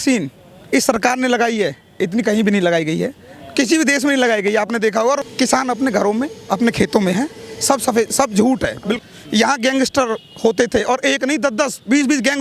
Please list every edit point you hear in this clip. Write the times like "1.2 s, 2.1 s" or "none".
5.2 s, 9.0 s